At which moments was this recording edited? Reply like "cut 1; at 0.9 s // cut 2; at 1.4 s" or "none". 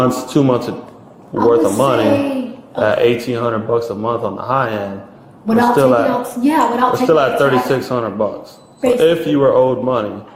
none